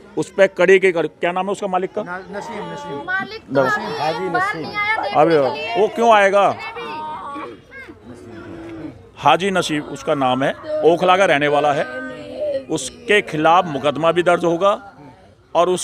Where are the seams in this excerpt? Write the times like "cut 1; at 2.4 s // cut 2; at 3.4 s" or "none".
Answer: none

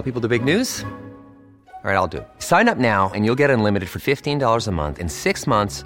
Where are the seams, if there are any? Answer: none

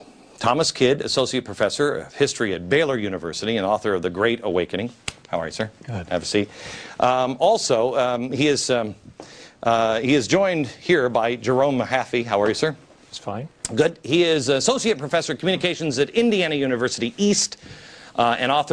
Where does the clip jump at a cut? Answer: cut 1; at 15.1 s

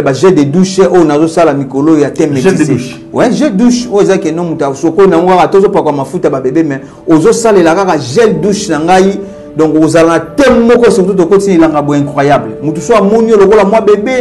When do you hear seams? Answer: none

